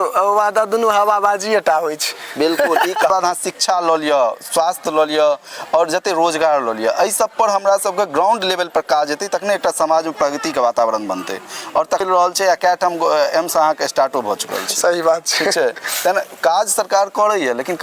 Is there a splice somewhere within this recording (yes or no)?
yes